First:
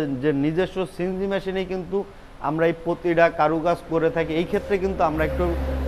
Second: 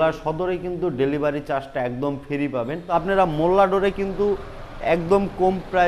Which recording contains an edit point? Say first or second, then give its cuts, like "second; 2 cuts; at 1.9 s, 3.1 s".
second; 1 cut; at 2.9 s